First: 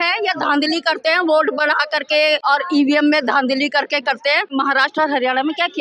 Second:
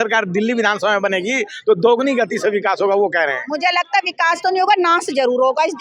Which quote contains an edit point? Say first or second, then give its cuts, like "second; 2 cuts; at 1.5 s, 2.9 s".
first; 2 cuts; at 2.4 s, 4.5 s